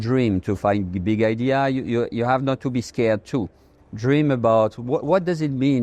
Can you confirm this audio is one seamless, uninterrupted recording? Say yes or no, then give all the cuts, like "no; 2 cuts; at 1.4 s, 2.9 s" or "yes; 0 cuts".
yes; 0 cuts